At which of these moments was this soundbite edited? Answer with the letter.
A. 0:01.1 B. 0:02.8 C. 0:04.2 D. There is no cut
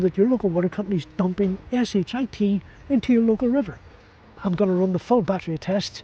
C